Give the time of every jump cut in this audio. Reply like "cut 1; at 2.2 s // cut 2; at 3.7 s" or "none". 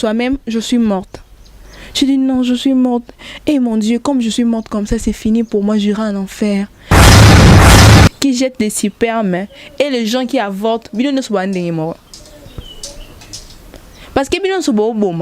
cut 1; at 6.8 s // cut 2; at 8.2 s // cut 3; at 12.1 s